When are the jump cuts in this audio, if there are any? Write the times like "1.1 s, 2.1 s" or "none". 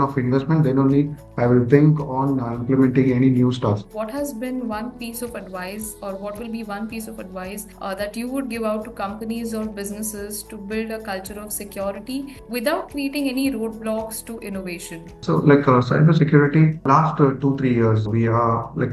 3.9 s